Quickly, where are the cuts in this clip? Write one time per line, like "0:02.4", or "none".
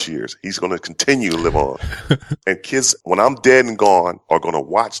0:02.2